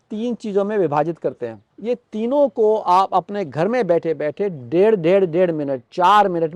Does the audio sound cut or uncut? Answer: cut